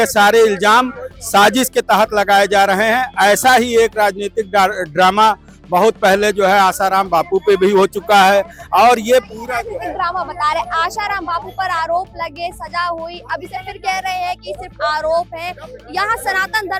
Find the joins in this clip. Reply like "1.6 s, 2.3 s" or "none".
none

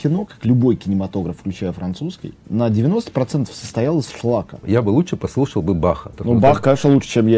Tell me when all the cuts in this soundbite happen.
2.3 s, 4.6 s, 6.1 s

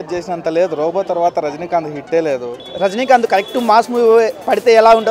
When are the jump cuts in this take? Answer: 2.6 s

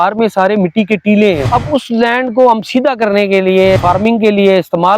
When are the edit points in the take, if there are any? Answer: 1.4 s, 3.8 s

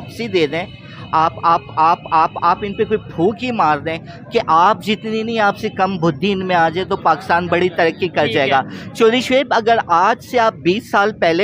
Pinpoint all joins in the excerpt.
none

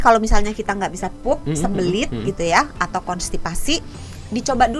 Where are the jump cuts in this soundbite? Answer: none

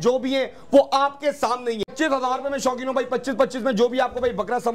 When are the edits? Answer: 1.9 s

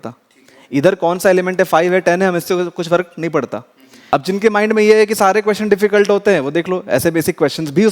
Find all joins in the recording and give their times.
3.9 s

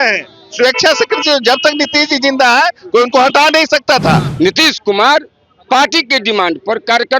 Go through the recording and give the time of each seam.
4.3 s

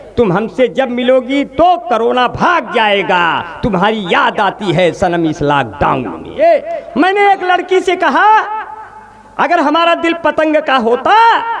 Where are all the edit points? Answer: 6.3 s

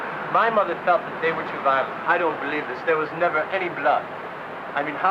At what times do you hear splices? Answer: 3.5 s

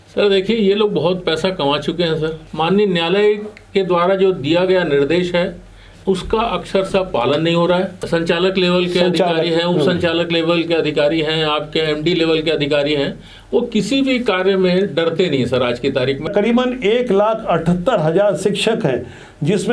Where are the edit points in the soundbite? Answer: 2.4 s, 8.0 s, 16.3 s

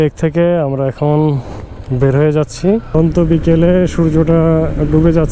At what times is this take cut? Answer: 2.9 s

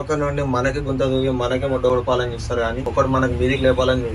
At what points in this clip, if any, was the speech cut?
2.8 s

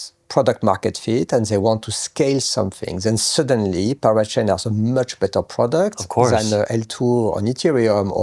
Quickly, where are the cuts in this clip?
none

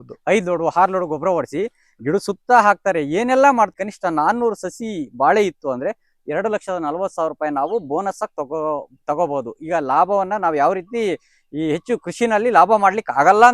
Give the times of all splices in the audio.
3.7 s

